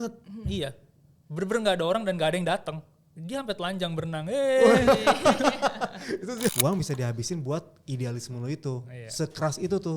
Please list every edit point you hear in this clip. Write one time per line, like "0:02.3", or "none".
0:06.5

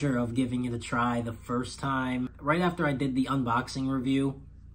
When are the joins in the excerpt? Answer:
0:02.4

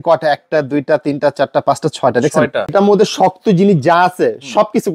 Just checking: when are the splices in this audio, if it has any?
0:02.7

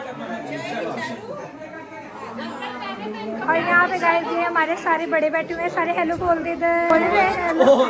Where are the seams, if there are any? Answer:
0:06.9

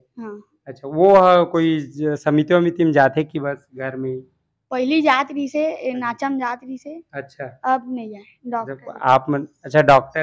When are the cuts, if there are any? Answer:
none

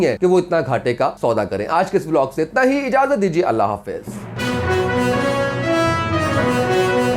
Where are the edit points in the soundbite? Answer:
none

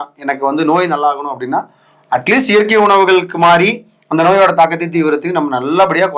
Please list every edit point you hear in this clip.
none

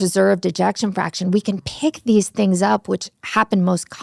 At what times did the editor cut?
none

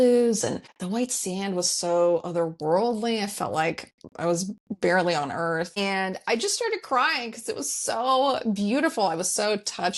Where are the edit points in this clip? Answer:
none

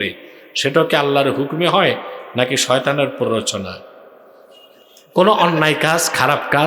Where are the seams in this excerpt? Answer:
none

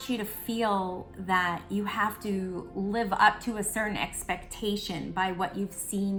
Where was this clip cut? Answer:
none

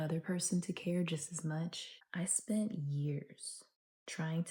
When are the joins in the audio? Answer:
0:01.9

